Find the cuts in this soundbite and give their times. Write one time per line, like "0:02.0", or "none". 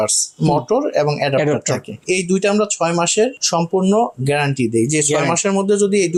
none